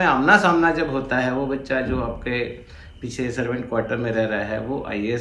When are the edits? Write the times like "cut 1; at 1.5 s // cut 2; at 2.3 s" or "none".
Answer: none